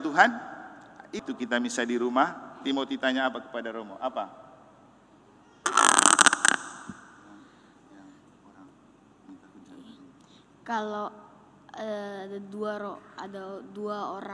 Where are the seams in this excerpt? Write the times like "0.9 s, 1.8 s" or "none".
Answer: 1.2 s

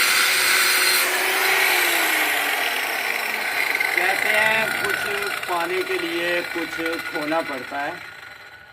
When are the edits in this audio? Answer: 1.0 s

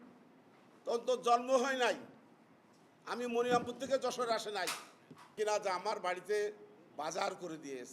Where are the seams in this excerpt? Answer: 5.4 s

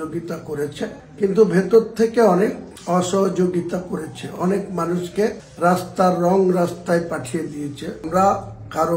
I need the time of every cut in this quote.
8.0 s

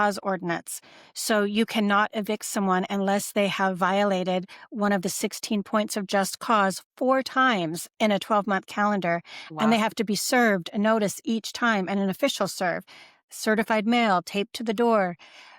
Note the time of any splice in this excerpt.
none

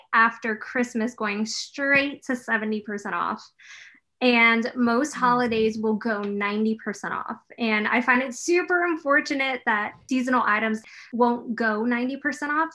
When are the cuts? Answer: 10.8 s

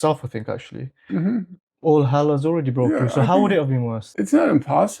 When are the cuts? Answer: 4.0 s

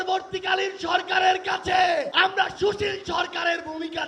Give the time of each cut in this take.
2.1 s

